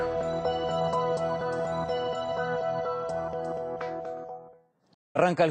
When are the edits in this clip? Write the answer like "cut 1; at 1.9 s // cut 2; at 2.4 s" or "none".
none